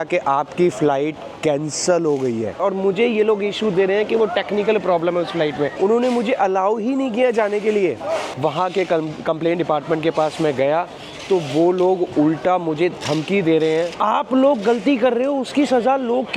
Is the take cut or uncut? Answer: cut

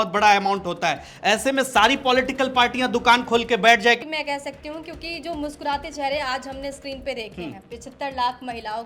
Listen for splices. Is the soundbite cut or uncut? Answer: cut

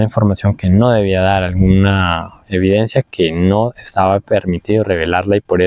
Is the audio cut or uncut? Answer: uncut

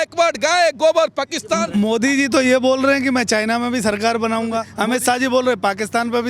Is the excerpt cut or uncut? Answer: cut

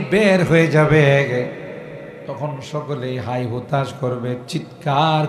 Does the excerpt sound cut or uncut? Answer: cut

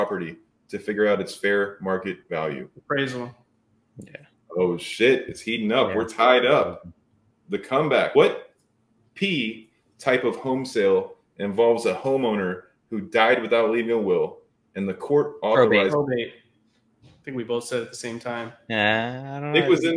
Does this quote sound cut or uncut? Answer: cut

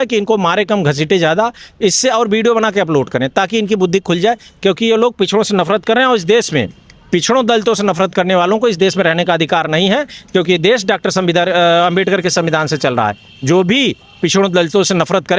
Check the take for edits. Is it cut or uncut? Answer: uncut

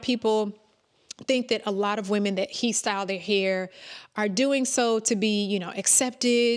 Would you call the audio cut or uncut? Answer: uncut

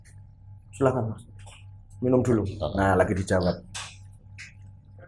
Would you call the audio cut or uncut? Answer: uncut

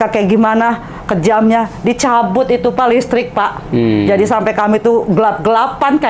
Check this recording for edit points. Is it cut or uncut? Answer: uncut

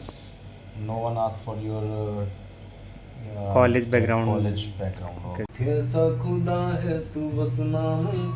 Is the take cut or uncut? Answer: cut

